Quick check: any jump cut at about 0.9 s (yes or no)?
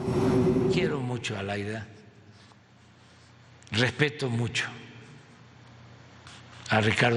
yes